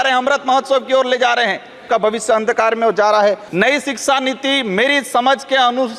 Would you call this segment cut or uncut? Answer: cut